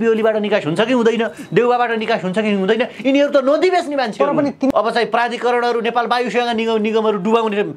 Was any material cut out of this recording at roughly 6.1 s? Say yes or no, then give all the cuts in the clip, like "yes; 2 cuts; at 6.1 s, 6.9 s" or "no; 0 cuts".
no; 1 cut; at 4.7 s